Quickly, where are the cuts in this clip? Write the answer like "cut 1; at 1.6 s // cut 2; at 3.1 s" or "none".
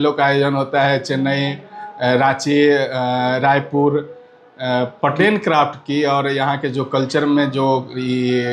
cut 1; at 5.2 s